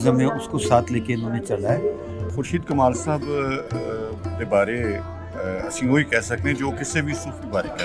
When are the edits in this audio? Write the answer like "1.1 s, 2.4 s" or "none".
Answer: 2.1 s